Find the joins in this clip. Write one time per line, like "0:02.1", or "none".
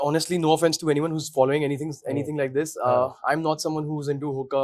none